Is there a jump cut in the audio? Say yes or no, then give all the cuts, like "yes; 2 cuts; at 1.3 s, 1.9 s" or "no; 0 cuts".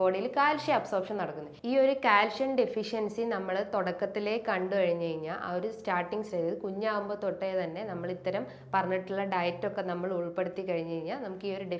yes; 1 cut; at 1.5 s